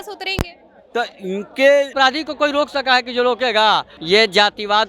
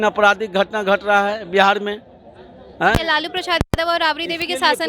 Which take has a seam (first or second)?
first